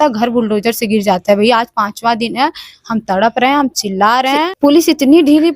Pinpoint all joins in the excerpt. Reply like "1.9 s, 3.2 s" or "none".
4.5 s

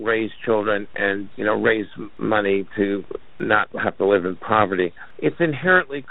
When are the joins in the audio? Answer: 1.3 s, 2.1 s, 3.4 s, 5.0 s

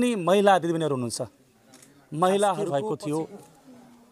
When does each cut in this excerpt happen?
2.6 s

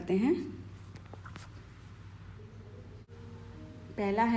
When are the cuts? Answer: 3.1 s

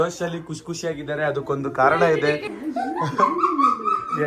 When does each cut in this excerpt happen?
2.5 s

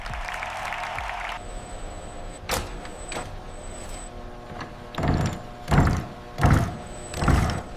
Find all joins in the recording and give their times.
1.3 s

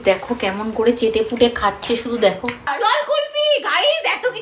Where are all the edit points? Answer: 2.7 s

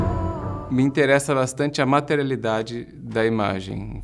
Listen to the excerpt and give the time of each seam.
2.6 s

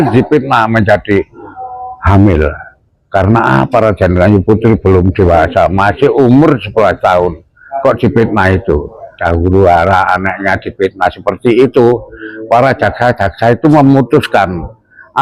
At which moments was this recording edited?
9.2 s

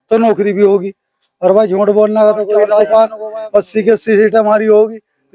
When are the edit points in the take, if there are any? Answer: 2.9 s

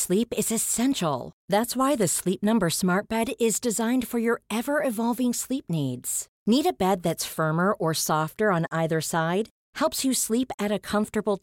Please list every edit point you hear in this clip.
none

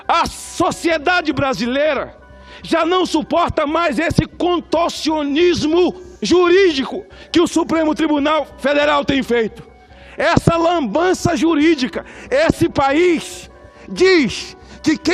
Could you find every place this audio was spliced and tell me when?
6.1 s

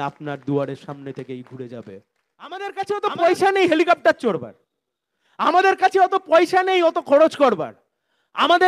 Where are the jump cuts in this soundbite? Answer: 2.7 s

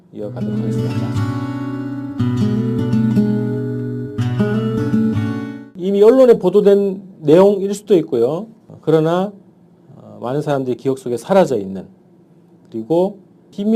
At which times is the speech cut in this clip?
6.0 s

